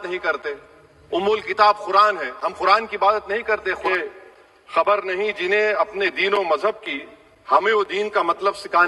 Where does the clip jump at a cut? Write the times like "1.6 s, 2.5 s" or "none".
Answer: 3.8 s